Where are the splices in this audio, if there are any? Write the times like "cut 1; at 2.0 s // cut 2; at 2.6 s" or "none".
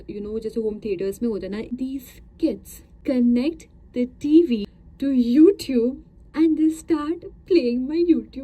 cut 1; at 1.8 s // cut 2; at 2.9 s // cut 3; at 4.8 s